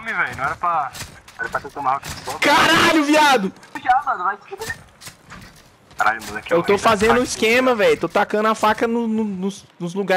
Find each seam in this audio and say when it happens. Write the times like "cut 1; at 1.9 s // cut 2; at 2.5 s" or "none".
cut 1; at 3.7 s